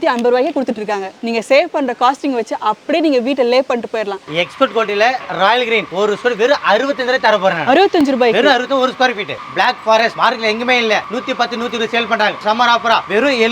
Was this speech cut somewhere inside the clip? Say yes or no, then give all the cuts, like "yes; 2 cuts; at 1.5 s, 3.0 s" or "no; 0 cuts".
yes; 5 cuts; at 1.1 s, 4.2 s, 5.9 s, 9.4 s, 12.4 s